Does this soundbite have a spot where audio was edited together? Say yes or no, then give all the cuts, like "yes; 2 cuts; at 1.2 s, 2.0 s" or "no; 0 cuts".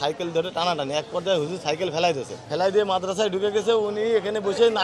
no; 0 cuts